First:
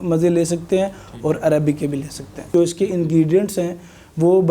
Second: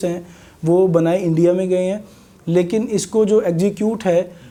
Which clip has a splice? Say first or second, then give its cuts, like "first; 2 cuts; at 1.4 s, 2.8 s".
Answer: first; 1 cut; at 2.5 s